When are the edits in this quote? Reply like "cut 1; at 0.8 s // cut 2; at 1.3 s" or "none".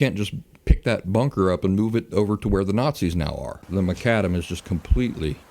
cut 1; at 3.6 s